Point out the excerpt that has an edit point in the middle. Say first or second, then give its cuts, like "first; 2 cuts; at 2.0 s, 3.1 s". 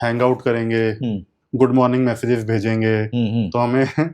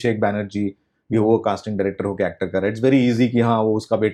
first; 1 cut; at 1.4 s